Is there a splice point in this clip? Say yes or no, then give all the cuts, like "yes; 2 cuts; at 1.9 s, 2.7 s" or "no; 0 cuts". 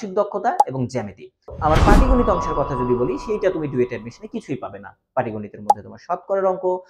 yes; 1 cut; at 1.5 s